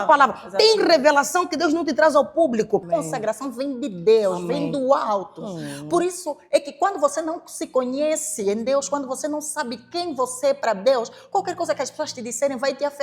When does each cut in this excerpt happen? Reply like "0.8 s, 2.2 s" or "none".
2.9 s